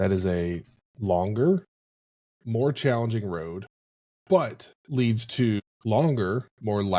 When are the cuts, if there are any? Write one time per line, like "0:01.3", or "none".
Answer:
0:05.6